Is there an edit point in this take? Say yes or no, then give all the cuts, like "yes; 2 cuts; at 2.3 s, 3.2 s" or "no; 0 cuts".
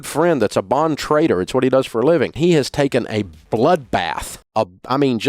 yes; 1 cut; at 2.3 s